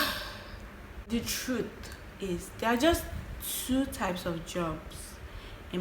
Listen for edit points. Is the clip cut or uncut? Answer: cut